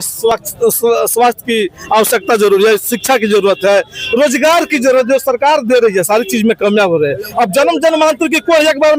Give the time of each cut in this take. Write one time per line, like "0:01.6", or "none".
none